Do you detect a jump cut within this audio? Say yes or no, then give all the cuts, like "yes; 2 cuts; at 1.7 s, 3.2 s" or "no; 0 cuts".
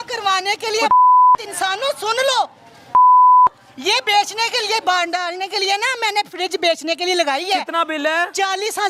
no; 0 cuts